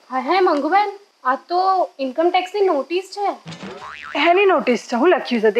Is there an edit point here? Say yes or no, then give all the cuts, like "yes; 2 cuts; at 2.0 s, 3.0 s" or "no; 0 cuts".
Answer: yes; 1 cut; at 1.1 s